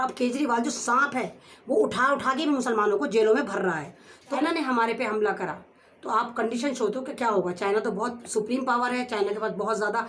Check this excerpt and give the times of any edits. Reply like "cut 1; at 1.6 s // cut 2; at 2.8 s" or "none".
cut 1; at 4.4 s